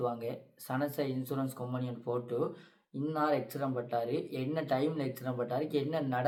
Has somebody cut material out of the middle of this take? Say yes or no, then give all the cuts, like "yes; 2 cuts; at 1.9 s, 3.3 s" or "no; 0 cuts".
no; 0 cuts